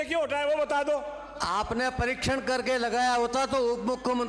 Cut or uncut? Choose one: uncut